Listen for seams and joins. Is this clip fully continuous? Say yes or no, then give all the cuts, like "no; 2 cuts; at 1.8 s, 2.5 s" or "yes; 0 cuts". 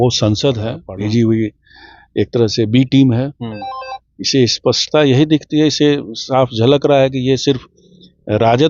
no; 1 cut; at 0.9 s